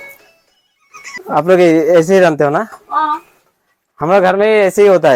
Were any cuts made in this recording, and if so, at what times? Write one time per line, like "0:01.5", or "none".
0:01.2

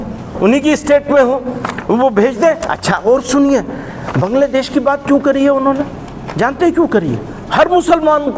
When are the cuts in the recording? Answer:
none

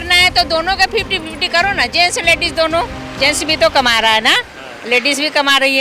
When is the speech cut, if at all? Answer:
none

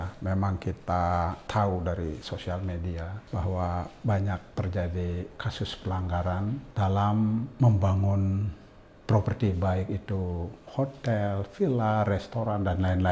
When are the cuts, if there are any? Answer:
0:01.4
0:03.2
0:04.5
0:06.7

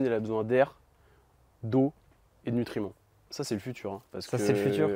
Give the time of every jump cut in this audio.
0:03.3

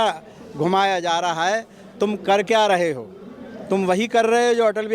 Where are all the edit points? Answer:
none

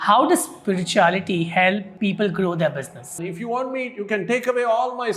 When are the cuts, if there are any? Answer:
0:01.9
0:03.2

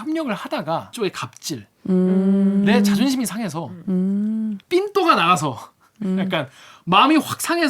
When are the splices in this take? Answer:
0:00.9

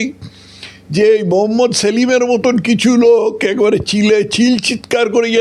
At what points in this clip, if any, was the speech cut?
none

